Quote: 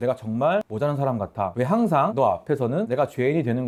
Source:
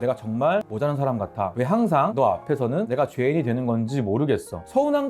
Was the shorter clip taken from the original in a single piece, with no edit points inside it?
yes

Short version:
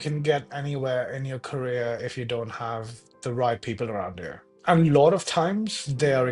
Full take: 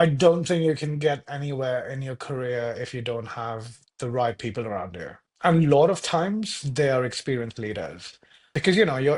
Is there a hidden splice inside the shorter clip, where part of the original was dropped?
no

